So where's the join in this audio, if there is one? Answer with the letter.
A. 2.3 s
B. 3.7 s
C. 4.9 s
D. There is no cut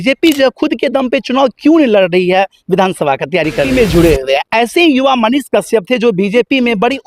B